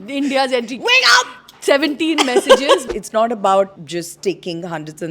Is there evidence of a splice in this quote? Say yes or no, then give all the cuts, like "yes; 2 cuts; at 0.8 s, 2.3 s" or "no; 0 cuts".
yes; 2 cuts; at 2.8 s, 3.8 s